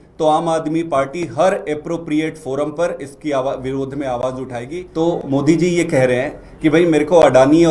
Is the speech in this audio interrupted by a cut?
yes; 1 cut; at 4.8 s

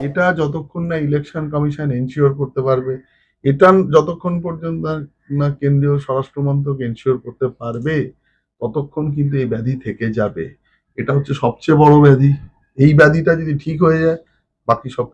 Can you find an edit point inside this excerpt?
no; 0 cuts

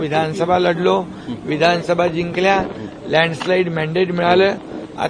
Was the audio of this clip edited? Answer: no; 0 cuts

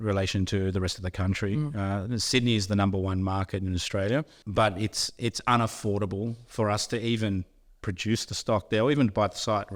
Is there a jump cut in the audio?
yes; 1 cut; at 4.4 s

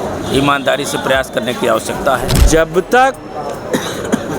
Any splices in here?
yes; 1 cut; at 2.4 s

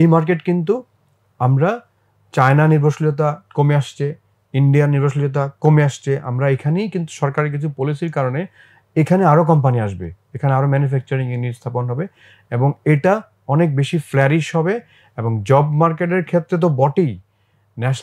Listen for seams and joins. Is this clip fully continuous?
yes; 0 cuts

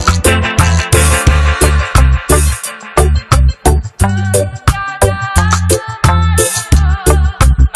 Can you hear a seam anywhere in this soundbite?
no; 0 cuts

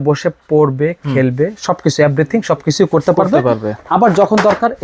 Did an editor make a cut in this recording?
no; 0 cuts

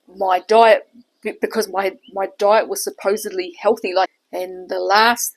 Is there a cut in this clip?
yes; 1 cut; at 4.1 s

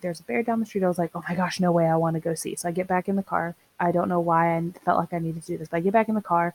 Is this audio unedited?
yes; 0 cuts

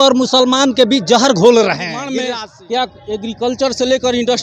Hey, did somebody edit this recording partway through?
yes; 1 cut; at 2.0 s

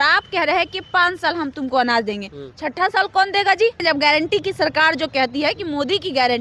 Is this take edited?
yes; 1 cut; at 3.8 s

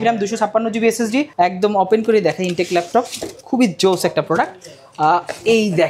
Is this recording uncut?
no; 1 cut; at 1.3 s

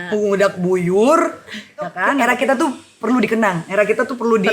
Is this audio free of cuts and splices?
no; 1 cut; at 2.2 s

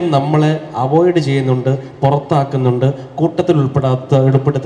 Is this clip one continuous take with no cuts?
yes; 0 cuts

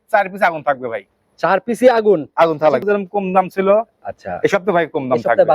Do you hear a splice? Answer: yes; 1 cut; at 2.8 s

